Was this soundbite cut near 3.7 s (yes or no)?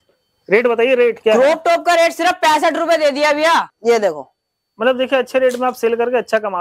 yes